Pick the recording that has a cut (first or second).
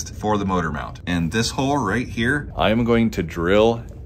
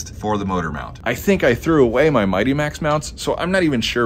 first